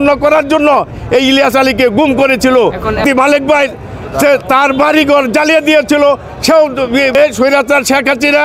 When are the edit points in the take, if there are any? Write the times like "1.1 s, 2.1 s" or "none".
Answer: 3.0 s, 7.4 s